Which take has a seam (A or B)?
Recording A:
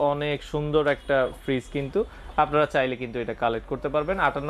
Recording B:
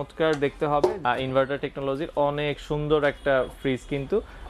B